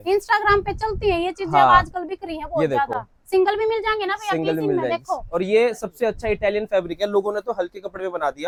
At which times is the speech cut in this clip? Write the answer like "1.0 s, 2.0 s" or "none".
none

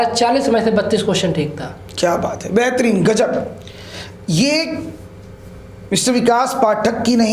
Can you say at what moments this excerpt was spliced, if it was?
none

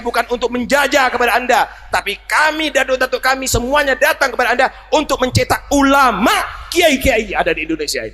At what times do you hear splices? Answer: none

